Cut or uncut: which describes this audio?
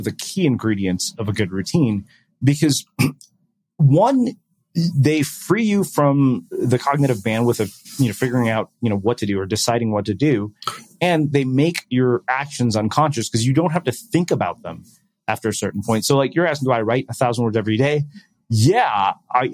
uncut